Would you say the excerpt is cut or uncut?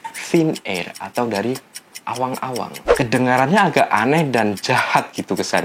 cut